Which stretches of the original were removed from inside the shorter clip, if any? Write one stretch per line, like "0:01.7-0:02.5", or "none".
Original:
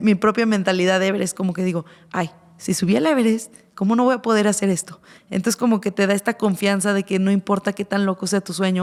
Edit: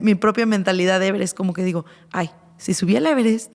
none